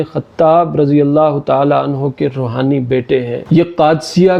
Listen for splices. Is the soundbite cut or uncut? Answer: uncut